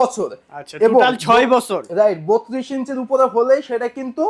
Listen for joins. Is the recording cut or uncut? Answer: uncut